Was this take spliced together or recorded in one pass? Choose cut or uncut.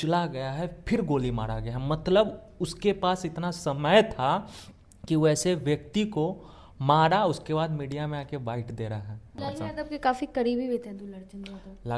cut